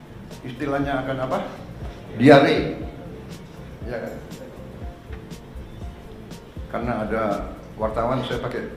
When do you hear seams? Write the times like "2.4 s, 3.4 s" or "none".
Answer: none

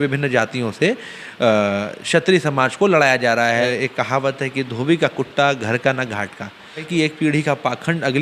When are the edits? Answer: 3.7 s, 6.9 s

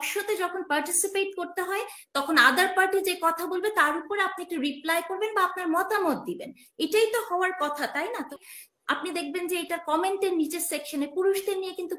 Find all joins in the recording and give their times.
8.3 s

